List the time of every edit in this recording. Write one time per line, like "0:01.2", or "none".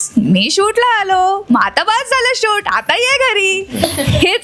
none